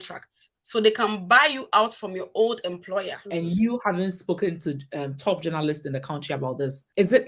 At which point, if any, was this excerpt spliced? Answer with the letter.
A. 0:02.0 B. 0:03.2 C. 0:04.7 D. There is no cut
B